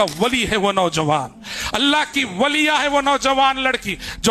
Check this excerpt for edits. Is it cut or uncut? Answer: uncut